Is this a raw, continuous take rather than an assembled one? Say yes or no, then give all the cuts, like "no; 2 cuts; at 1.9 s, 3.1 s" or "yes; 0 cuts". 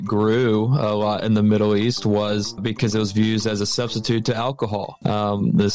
no; 2 cuts; at 2.6 s, 4.9 s